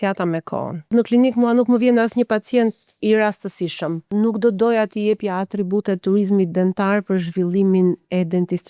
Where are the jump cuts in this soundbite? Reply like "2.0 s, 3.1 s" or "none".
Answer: 0.9 s, 4.1 s